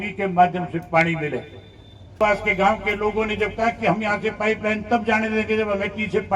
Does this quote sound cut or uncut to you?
cut